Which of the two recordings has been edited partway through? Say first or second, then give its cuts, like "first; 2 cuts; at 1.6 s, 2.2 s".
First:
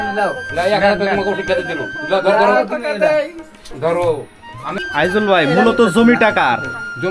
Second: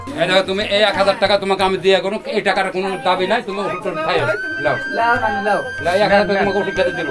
first; 1 cut; at 4.8 s